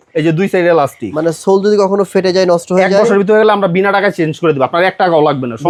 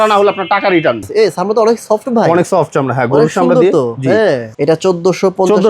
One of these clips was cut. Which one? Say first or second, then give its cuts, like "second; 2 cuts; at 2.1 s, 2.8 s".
second; 2 cuts; at 1.1 s, 4.5 s